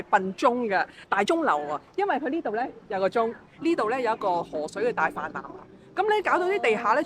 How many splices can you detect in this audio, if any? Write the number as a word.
one